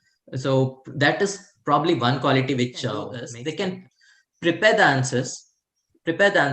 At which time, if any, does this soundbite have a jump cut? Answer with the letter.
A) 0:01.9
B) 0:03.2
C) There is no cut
B